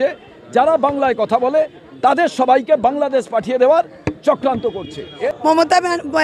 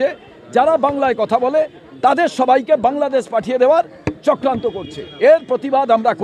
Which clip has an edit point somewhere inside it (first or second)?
first